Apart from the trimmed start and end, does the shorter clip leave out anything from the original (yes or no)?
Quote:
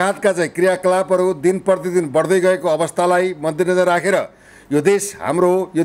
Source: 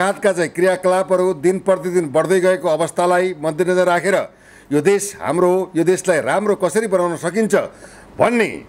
no